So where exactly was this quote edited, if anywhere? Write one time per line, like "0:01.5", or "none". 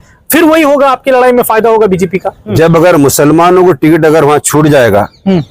0:02.4